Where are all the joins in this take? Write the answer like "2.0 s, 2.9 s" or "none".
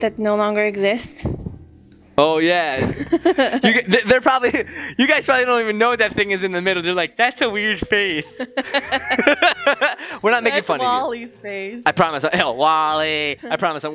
none